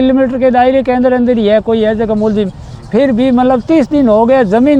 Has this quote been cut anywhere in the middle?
no; 0 cuts

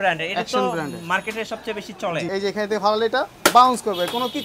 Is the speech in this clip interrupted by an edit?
yes; 1 cut; at 2.3 s

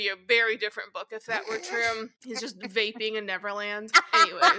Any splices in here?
yes; 1 cut; at 2.2 s

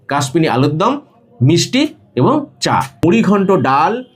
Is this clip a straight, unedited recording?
no; 1 cut; at 3.0 s

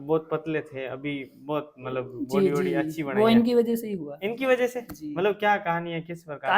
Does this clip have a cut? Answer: no; 0 cuts

